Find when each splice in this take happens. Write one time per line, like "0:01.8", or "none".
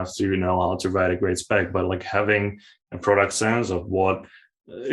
none